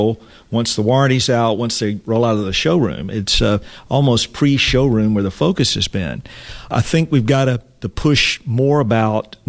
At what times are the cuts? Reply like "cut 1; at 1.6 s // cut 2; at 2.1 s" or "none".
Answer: cut 1; at 6.7 s